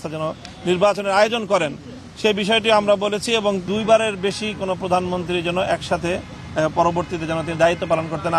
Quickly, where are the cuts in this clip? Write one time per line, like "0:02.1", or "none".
0:03.7

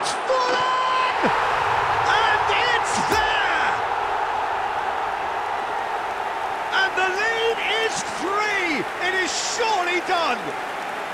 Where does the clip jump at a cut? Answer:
none

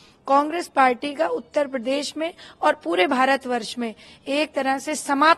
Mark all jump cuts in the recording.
none

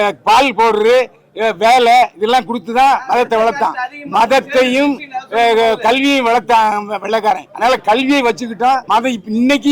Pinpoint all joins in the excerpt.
0:07.5
0:08.8

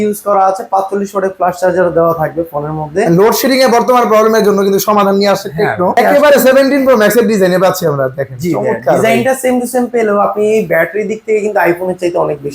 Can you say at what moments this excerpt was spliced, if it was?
0:06.0

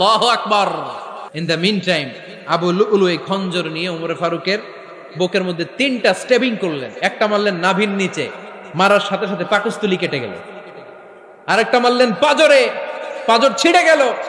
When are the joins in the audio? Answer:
0:01.3

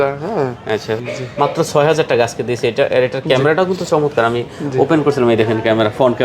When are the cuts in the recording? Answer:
0:01.0

